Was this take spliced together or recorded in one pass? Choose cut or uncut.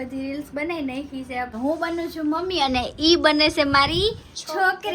cut